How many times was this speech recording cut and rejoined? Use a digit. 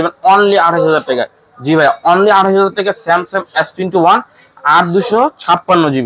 0